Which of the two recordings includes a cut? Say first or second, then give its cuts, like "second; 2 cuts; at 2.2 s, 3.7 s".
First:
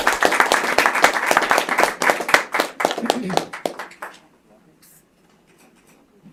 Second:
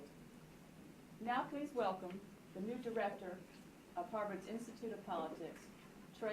second; 1 cut; at 1.5 s